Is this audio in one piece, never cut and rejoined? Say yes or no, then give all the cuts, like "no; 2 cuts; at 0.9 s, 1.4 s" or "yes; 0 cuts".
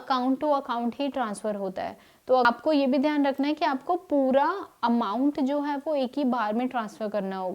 no; 1 cut; at 2.4 s